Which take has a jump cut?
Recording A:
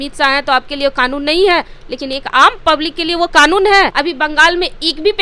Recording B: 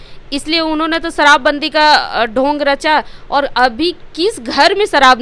A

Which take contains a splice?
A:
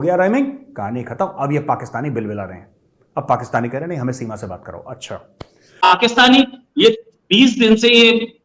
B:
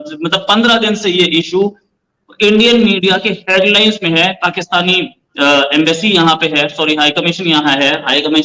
A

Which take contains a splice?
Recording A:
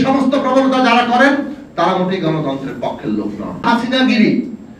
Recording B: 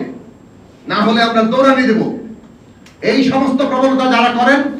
A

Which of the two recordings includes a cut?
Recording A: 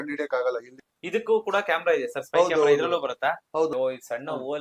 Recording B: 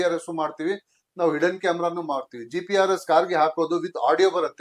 A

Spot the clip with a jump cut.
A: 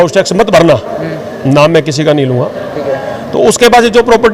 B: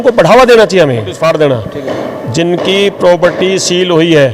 B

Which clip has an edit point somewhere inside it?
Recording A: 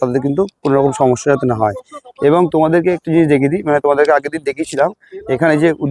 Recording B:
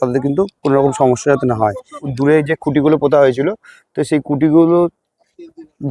B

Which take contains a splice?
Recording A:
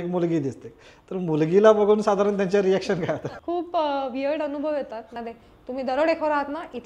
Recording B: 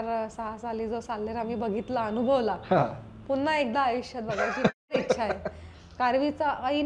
A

